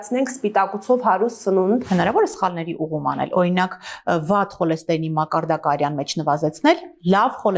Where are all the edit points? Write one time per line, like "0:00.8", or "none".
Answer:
0:01.9